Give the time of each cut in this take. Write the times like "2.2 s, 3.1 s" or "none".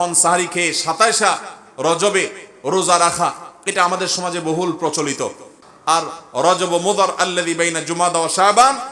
5.6 s